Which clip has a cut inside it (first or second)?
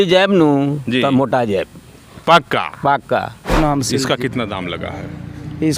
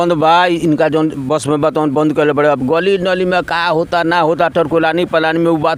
first